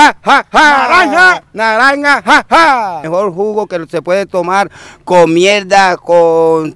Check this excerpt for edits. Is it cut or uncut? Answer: cut